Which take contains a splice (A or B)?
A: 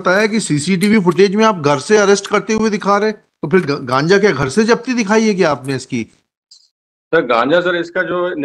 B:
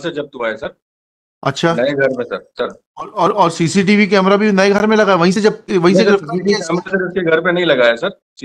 A